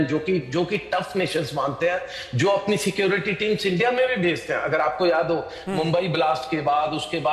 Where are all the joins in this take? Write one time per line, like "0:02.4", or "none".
none